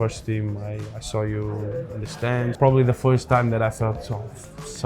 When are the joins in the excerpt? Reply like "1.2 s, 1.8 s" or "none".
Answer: 2.5 s